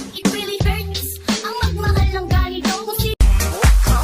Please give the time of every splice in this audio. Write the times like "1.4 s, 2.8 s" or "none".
3.1 s